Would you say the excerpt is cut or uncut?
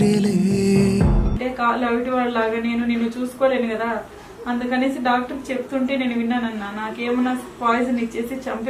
uncut